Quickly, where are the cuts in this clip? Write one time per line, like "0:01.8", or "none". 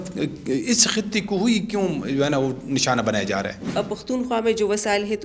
0:03.7